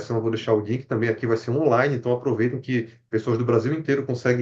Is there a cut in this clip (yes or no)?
no